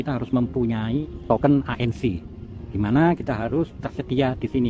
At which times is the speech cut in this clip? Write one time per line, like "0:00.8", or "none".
0:01.0

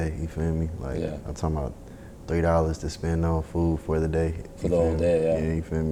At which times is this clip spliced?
none

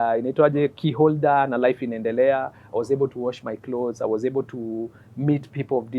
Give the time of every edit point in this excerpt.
none

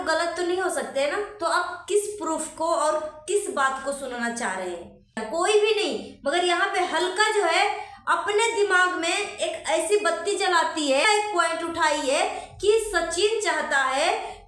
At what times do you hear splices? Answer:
0:05.2
0:11.1

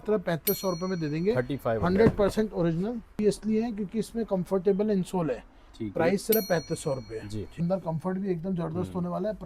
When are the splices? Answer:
0:03.2
0:07.6

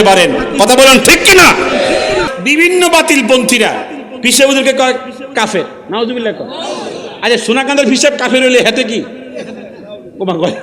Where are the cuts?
0:02.3

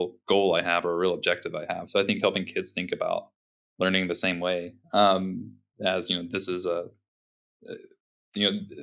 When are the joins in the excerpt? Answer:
none

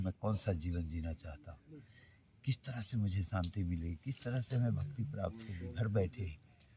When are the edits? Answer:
none

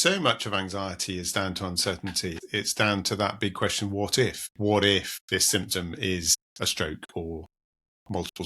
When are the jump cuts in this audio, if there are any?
0:02.4
0:04.4
0:05.2

